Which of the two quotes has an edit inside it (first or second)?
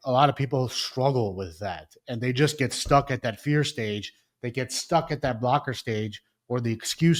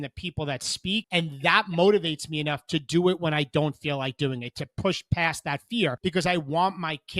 second